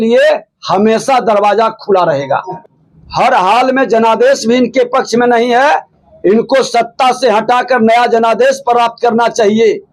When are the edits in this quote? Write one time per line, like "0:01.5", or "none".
0:02.6

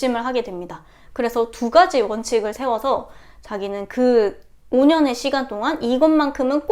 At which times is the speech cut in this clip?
none

